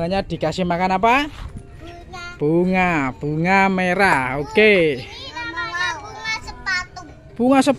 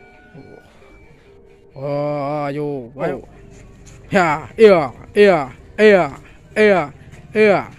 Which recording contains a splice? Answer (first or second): second